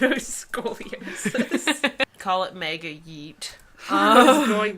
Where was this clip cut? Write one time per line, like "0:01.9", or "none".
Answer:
0:02.1